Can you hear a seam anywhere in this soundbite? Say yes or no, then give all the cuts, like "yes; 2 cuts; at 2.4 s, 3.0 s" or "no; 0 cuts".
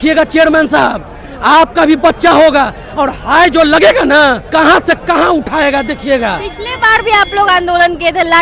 yes; 1 cut; at 4.4 s